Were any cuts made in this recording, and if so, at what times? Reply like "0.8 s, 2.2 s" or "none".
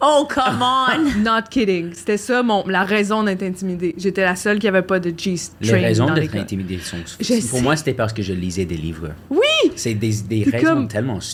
none